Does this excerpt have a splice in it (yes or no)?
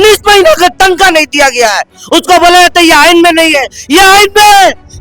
yes